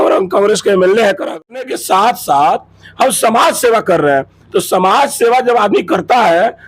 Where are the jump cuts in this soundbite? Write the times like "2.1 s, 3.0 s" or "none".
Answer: 1.4 s